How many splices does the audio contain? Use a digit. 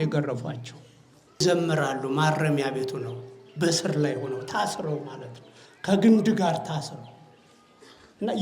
1